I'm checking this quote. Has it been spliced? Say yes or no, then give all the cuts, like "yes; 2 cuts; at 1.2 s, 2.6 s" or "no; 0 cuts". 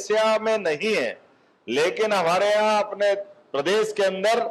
no; 0 cuts